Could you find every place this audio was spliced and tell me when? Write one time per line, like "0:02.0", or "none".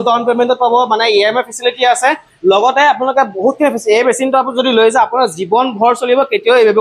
none